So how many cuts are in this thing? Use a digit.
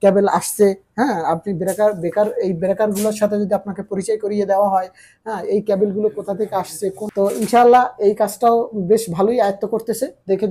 1